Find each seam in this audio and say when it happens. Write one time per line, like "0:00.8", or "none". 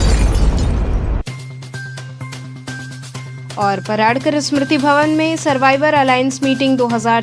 0:03.1